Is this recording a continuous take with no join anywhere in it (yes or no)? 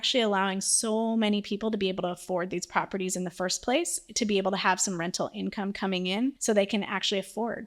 no